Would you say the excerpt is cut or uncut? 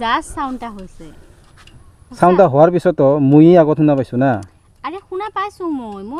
uncut